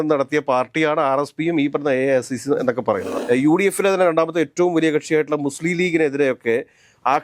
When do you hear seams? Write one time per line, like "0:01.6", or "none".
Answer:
0:03.1